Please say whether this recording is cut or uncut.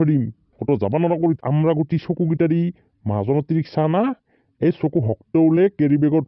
cut